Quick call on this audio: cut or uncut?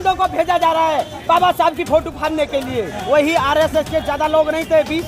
cut